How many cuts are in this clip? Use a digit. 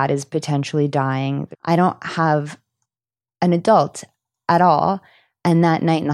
1